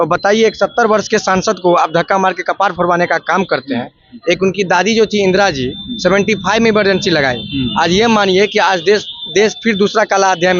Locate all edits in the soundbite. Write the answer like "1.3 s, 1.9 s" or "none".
none